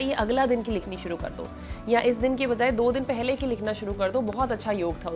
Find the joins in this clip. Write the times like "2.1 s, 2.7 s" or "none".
none